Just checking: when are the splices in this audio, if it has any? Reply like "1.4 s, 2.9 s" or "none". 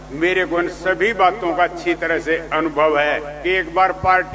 3.3 s